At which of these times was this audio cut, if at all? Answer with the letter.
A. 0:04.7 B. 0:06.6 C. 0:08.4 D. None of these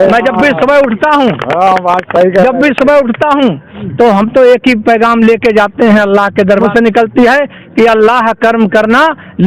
B